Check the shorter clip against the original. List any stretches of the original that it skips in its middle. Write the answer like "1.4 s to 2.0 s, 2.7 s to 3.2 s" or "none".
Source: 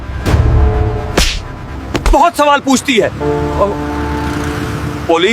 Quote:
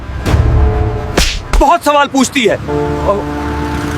1.5 s to 2.0 s